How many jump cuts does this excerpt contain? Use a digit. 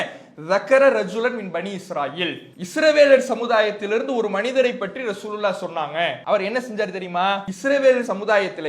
3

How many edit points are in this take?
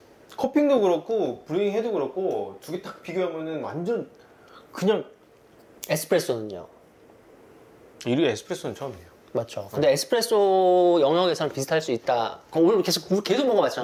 0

